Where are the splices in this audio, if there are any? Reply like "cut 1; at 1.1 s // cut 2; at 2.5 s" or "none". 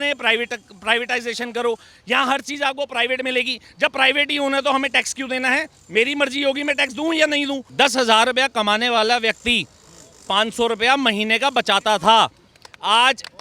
cut 1; at 7.7 s